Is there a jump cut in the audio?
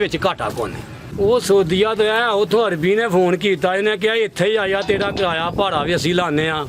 yes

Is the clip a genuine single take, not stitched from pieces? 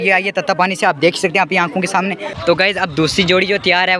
no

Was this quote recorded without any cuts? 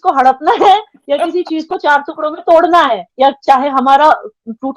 no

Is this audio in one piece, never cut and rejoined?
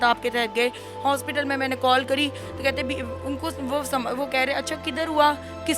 yes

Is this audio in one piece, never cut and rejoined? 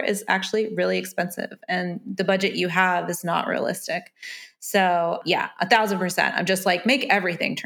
yes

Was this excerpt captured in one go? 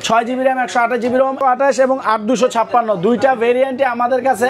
no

